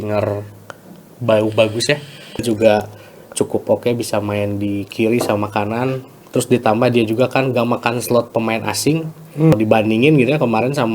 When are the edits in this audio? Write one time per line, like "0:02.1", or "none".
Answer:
0:02.4
0:09.5